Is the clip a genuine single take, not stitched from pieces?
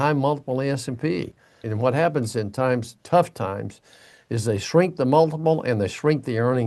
no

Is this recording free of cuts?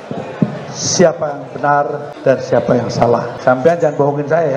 no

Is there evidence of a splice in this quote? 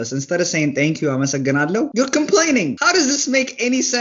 yes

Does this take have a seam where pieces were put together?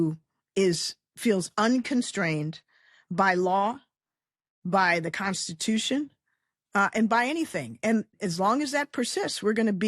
yes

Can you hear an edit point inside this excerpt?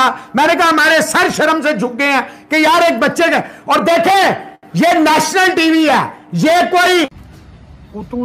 yes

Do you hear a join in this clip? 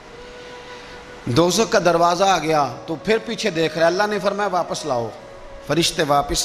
no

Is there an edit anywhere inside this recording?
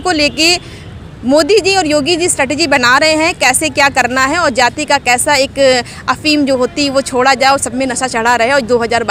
no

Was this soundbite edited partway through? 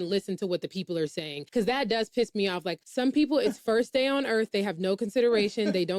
yes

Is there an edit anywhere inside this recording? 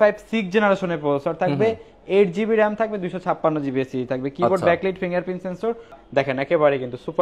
no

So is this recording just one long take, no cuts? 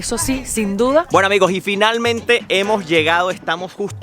no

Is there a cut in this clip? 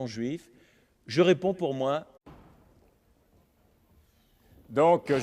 no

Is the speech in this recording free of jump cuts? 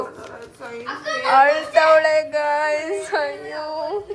yes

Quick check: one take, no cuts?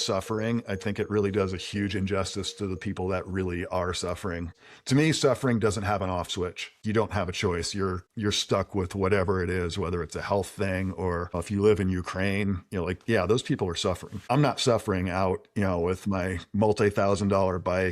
no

